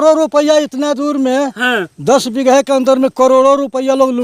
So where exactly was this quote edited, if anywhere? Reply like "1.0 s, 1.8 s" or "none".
none